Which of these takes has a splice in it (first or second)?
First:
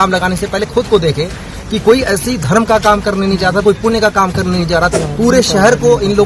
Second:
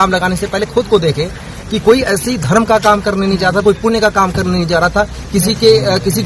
first